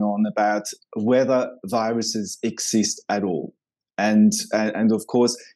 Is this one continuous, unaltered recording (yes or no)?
yes